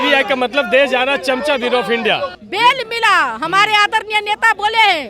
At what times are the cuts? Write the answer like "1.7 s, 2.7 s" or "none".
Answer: 2.3 s